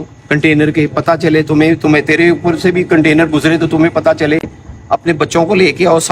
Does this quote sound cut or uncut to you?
uncut